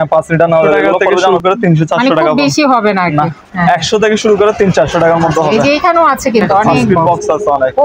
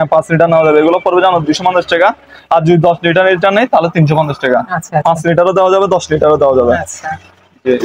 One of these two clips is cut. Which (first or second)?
first